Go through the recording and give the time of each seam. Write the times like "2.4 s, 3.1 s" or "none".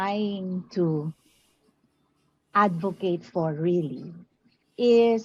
none